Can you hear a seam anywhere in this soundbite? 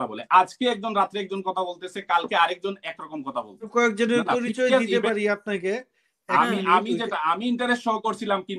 yes; 1 cut; at 3.7 s

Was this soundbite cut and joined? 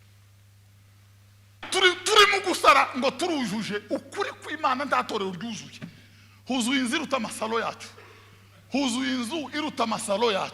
yes; 1 cut; at 1.7 s

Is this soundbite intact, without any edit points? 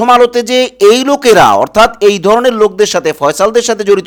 yes; 0 cuts

